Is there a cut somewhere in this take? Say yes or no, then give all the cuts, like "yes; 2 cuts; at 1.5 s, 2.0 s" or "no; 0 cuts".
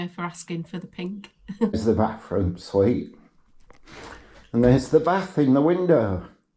yes; 1 cut; at 1.7 s